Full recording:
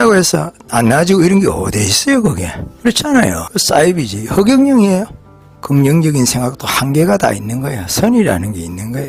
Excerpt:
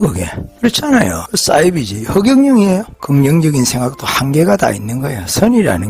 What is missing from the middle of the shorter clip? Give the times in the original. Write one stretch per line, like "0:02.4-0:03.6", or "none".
0:05.2-0:05.5